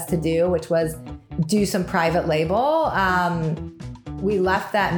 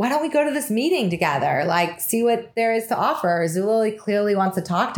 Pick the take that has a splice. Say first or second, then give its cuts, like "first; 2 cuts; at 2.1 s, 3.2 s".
first; 2 cuts; at 1.2 s, 4.1 s